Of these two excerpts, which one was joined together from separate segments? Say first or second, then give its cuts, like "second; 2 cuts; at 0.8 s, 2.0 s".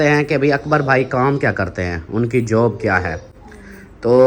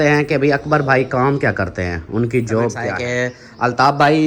second; 1 cut; at 2.9 s